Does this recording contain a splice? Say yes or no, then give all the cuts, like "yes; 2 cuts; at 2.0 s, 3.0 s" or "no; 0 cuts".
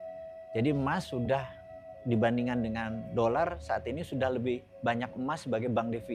no; 0 cuts